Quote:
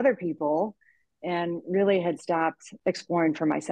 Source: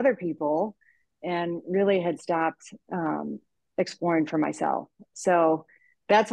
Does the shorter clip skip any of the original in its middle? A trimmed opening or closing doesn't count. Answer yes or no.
yes